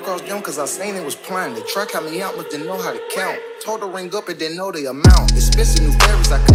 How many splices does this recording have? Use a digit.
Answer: 0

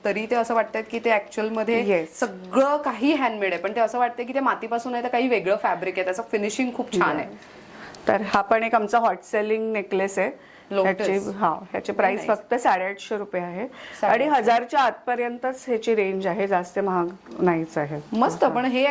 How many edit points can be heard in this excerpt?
0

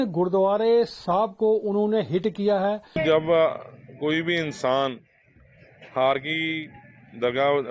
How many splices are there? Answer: 1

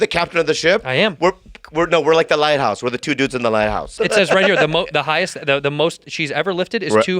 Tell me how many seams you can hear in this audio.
1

